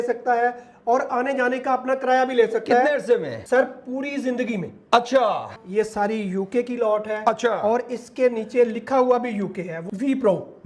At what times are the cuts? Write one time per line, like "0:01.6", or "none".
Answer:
0:03.4
0:05.5
0:09.8